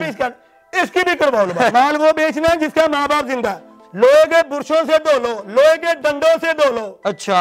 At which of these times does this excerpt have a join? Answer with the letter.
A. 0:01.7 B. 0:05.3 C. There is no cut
A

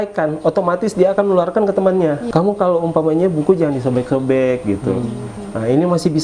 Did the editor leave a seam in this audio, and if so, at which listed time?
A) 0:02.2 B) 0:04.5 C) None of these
A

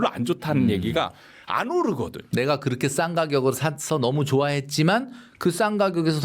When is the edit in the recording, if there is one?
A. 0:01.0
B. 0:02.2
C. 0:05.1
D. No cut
B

